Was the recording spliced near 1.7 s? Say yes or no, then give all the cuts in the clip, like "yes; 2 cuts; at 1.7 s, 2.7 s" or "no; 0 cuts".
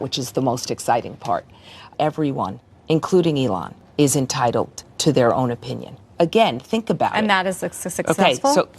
yes; 2 cuts; at 1.7 s, 6.0 s